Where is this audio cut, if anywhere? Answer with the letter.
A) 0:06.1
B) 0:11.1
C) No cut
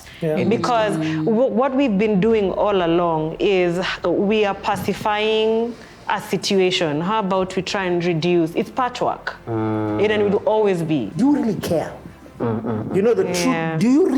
B